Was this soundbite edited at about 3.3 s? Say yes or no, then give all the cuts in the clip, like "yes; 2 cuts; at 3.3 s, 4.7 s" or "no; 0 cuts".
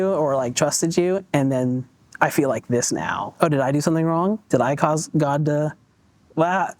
yes; 1 cut; at 3.3 s